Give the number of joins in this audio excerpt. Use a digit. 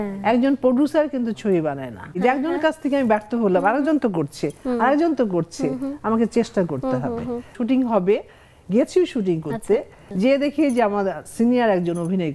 3